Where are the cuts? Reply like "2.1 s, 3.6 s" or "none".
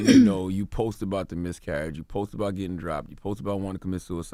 none